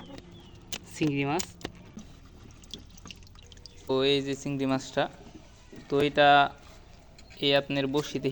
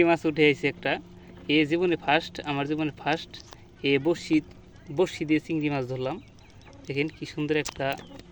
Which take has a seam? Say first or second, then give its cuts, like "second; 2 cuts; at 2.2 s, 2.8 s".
first; 2 cuts; at 2.0 s, 3.9 s